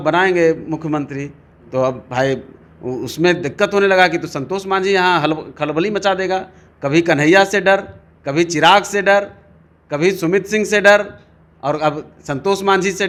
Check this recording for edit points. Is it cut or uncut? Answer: uncut